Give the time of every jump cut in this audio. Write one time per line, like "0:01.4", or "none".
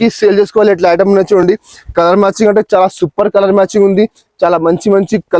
none